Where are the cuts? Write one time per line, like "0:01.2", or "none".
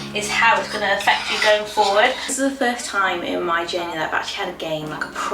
0:02.3